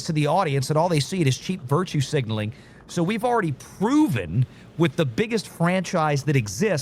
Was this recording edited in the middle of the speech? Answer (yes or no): no